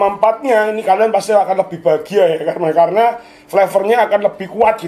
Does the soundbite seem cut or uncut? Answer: uncut